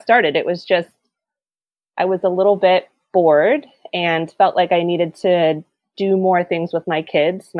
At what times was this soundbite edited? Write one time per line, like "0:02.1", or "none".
none